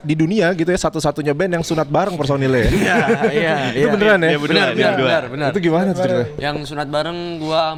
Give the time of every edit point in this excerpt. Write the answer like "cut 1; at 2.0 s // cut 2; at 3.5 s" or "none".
none